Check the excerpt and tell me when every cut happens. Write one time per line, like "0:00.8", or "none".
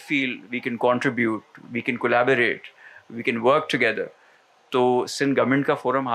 none